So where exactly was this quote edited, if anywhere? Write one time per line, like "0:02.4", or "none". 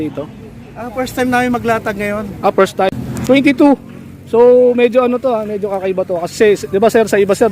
0:02.9